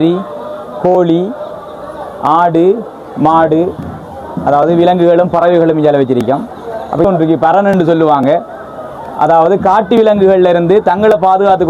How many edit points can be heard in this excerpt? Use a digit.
1